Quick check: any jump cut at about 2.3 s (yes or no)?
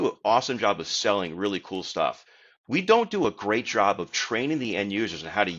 no